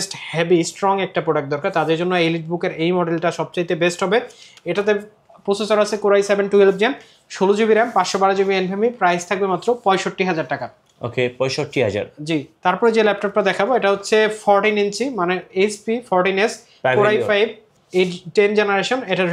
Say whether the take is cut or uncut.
uncut